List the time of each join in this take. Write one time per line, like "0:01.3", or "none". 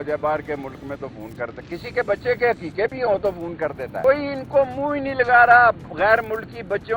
0:04.0